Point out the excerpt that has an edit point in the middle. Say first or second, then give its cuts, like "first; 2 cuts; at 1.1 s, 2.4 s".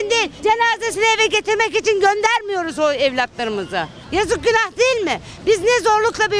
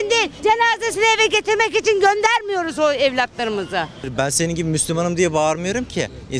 second; 1 cut; at 4.0 s